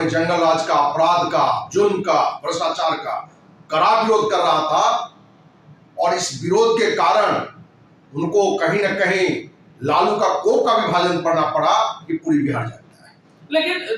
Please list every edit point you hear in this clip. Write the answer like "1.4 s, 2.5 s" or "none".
none

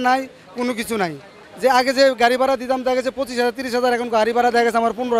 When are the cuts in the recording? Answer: 1.3 s

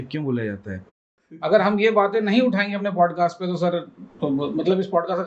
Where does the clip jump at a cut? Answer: 1.4 s

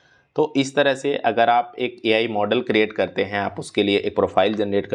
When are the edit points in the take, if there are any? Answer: none

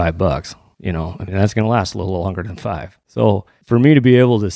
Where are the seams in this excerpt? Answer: 3.5 s

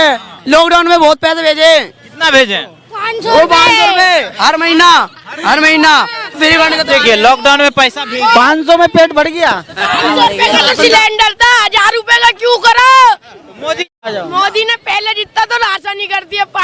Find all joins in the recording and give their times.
13.9 s

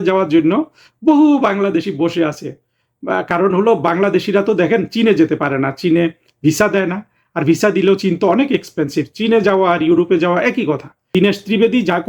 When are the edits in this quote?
11.1 s

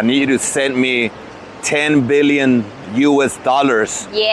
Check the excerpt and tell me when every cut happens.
none

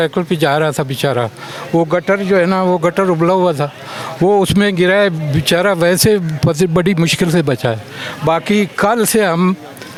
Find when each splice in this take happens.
none

